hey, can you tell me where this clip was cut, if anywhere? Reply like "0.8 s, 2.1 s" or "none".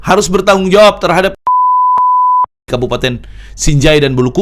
none